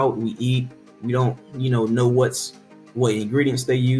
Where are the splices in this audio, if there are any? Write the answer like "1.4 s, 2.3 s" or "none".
none